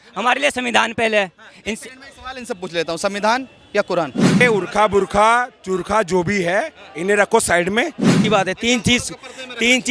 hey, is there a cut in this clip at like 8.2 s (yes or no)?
yes